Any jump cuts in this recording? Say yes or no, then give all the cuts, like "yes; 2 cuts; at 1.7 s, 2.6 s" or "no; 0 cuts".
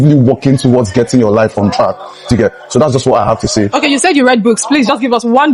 no; 0 cuts